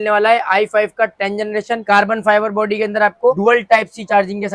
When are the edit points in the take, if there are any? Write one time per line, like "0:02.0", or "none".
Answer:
0:01.8